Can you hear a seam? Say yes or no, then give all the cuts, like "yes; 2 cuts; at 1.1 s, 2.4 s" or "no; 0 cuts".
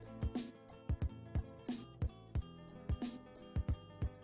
no; 0 cuts